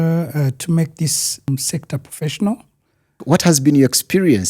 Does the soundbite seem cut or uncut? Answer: cut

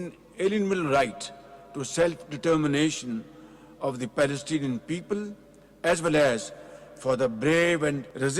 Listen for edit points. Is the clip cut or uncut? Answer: uncut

